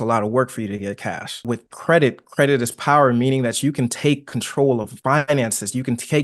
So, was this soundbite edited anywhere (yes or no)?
yes